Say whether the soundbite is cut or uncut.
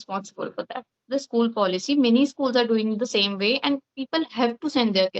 cut